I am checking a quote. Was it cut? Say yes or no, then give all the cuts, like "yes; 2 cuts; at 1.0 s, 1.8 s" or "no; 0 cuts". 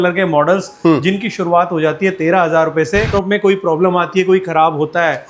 yes; 1 cut; at 3.1 s